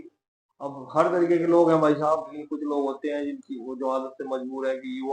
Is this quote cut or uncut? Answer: cut